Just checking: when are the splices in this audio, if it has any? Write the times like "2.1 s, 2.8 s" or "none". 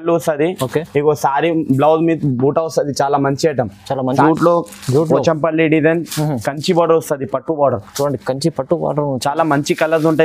4.2 s

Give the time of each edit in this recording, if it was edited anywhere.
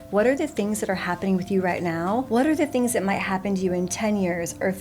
2.3 s

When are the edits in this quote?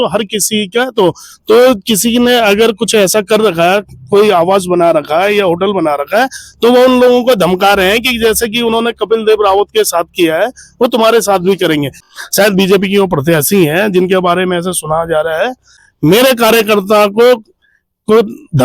12.0 s, 15.8 s

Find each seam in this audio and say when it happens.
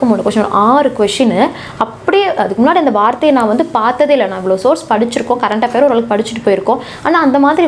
none

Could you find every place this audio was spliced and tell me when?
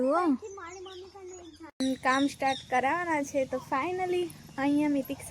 1.8 s

